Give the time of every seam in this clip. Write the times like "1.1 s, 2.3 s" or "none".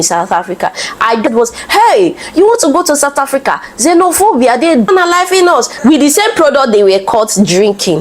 1.3 s, 4.9 s